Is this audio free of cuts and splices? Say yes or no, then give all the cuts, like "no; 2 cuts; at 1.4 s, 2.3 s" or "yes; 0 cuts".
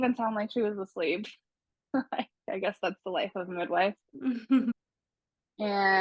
yes; 0 cuts